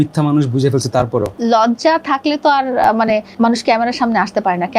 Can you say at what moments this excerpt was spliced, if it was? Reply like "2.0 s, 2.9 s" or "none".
1.3 s, 3.3 s